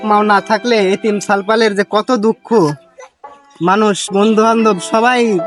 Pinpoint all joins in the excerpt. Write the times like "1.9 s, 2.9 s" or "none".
none